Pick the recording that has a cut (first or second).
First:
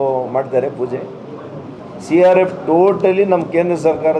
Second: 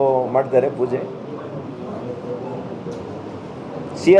first